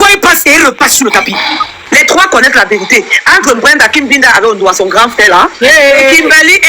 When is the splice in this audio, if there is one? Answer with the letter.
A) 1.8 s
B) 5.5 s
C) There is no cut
A